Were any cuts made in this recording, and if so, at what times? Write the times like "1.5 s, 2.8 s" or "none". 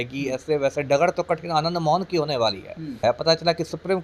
3.0 s